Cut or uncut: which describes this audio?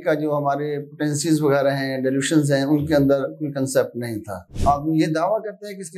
cut